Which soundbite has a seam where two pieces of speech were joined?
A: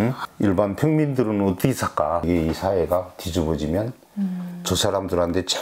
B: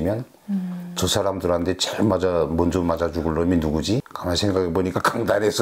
A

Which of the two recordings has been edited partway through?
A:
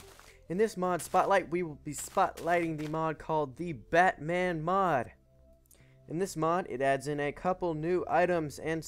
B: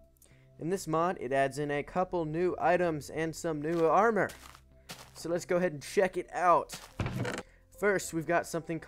A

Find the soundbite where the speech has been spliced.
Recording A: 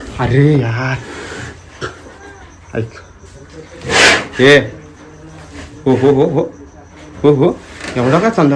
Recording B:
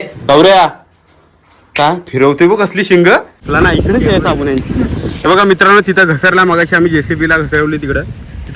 B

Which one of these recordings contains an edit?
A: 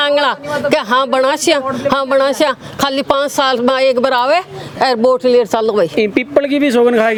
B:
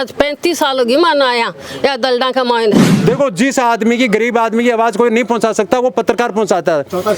B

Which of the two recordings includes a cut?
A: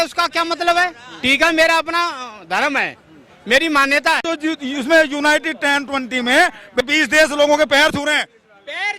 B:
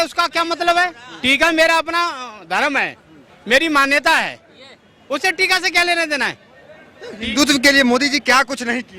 A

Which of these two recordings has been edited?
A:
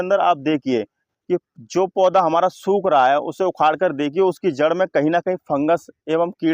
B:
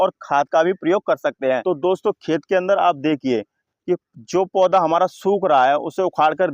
B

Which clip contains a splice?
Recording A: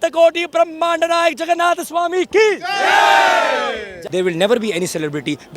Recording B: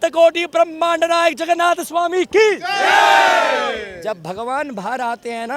A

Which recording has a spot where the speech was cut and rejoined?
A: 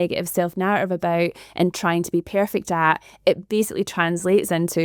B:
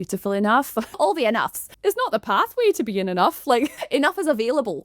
B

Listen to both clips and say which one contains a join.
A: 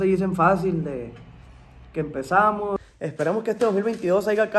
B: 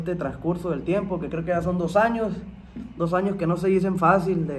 A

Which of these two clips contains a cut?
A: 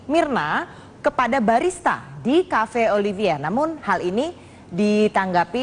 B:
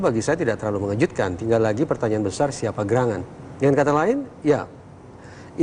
B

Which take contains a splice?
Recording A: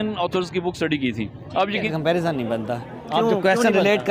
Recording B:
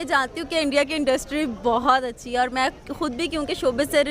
A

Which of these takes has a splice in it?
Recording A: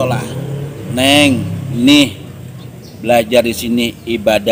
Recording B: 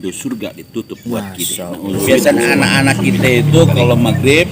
B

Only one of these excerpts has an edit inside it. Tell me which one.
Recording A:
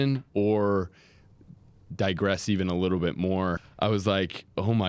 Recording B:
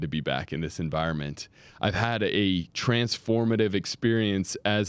A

